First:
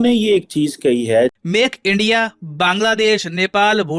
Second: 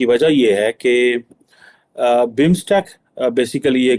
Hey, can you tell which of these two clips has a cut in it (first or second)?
first